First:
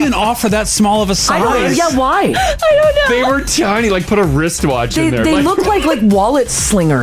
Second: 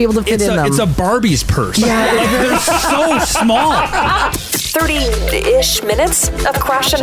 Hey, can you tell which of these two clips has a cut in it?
second; 1 cut; at 4.3 s

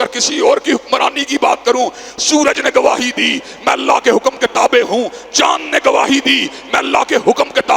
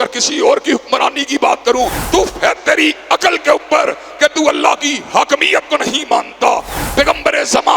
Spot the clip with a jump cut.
second; 2 cuts; at 2.0 s, 6.8 s

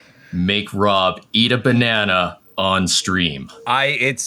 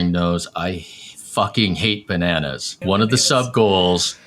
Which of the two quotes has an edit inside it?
second; 1 cut; at 2.8 s

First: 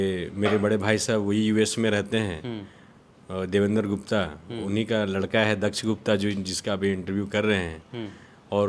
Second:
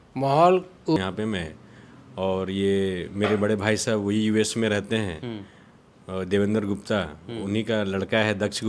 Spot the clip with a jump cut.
second; 1 cut; at 1.0 s

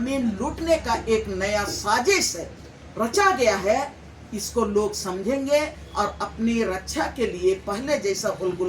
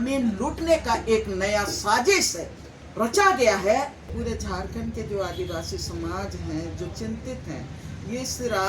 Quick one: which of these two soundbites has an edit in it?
second; 1 cut; at 4.1 s

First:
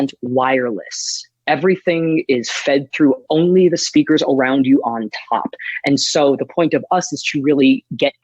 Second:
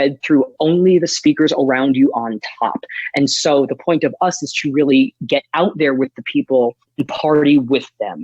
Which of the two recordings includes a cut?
second; 1 cut; at 6.8 s

